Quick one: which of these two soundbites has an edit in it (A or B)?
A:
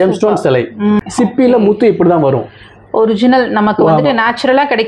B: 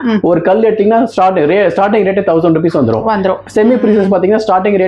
A